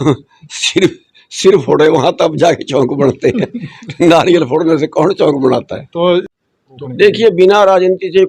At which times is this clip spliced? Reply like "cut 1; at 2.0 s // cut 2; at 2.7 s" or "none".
cut 1; at 6.3 s